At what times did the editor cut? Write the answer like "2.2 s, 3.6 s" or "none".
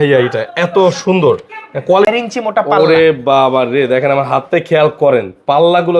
2.1 s